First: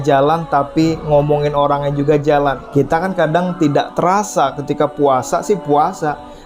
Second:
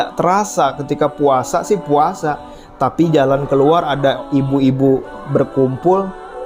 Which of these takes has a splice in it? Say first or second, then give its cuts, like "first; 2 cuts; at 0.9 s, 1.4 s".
first; 1 cut; at 2.6 s